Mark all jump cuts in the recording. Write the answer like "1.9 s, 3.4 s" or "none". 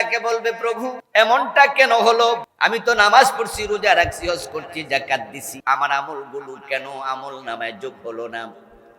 0.9 s, 2.5 s, 5.5 s